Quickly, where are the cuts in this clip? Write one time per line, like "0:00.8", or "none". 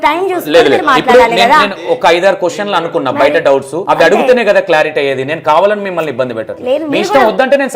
0:03.7